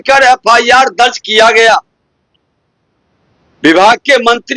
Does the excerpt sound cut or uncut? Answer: uncut